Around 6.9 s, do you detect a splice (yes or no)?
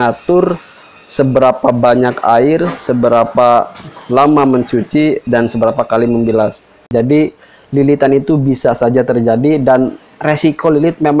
yes